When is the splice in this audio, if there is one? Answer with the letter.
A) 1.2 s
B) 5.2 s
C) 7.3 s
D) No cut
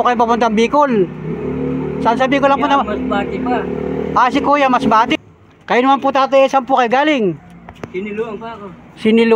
B